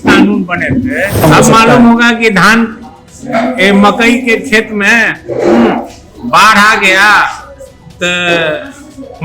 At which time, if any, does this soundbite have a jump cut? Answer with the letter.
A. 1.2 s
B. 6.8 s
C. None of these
A